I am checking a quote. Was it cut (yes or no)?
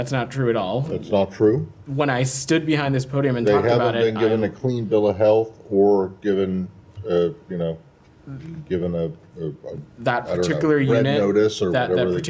no